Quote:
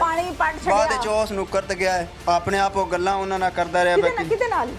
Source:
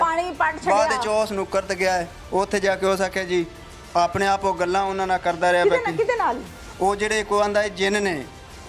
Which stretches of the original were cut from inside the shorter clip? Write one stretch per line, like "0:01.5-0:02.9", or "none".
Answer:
0:02.1-0:03.8